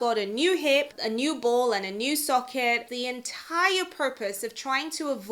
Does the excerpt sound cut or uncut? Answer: cut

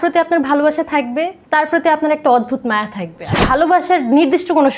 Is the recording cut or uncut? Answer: cut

